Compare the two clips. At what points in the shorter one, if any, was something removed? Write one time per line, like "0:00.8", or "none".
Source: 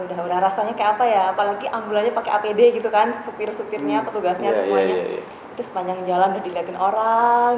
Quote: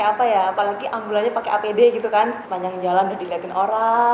0:02.4